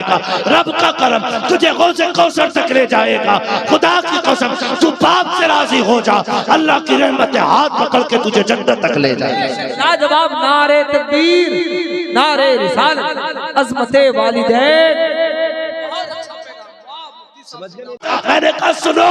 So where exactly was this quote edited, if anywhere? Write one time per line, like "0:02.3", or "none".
0:18.0